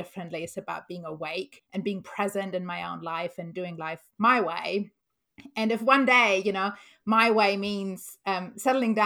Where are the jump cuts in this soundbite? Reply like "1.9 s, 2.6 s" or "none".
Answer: 1.6 s